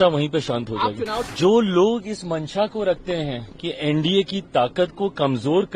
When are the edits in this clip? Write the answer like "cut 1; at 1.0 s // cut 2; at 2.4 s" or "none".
cut 1; at 1.2 s